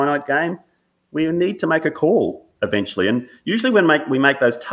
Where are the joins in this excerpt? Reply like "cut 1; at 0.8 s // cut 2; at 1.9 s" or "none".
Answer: none